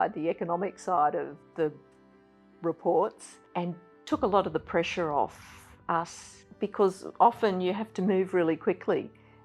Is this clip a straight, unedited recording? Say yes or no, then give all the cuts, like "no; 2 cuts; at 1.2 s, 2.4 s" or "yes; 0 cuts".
yes; 0 cuts